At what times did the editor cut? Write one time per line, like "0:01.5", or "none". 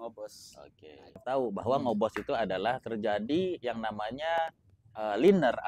0:01.2